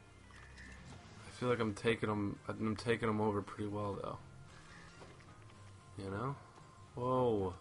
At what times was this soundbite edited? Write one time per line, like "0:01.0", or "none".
none

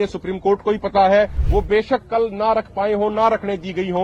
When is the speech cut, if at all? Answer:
0:01.4

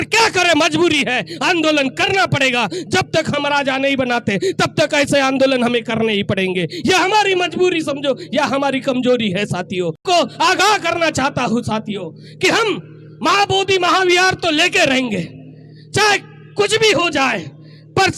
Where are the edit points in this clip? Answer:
0:10.0

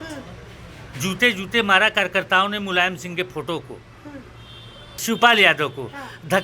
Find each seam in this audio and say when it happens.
0:05.0

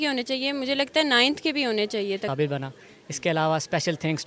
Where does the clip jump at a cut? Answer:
0:02.3

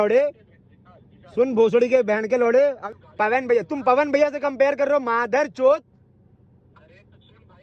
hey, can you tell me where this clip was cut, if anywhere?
0:02.9

